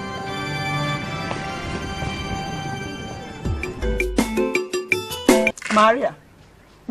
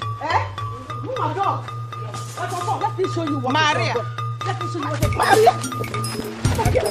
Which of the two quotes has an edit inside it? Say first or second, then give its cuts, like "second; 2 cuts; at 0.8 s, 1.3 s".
first; 1 cut; at 5.5 s